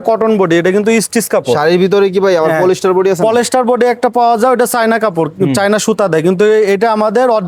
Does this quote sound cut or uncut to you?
uncut